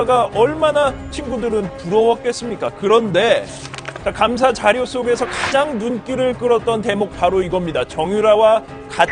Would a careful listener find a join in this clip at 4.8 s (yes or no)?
no